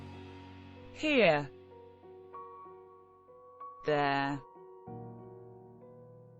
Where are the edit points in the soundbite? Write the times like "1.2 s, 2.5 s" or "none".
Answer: 0.9 s